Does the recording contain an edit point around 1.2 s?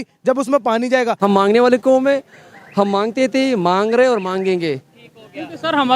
yes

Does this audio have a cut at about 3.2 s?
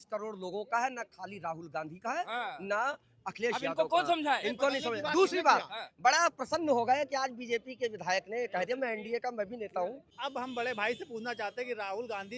no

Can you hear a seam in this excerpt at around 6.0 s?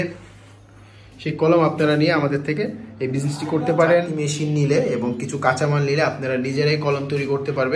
no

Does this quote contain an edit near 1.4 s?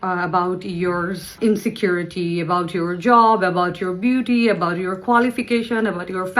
yes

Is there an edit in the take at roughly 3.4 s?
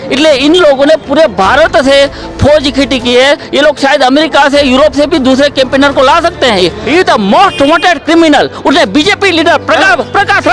no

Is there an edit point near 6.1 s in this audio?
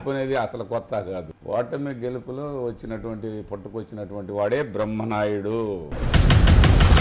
yes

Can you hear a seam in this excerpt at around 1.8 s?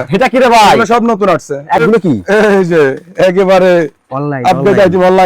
yes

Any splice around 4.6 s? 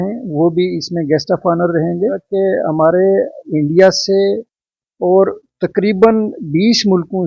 no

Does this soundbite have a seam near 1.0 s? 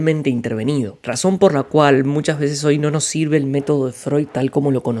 yes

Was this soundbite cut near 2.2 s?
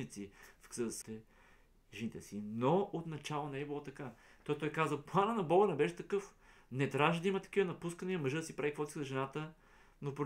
no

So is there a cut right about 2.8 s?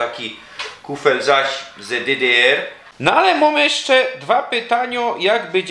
yes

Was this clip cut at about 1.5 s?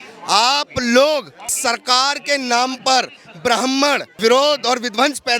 yes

